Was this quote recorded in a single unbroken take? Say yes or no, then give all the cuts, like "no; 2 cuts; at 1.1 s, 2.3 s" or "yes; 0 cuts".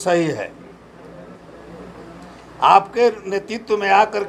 yes; 0 cuts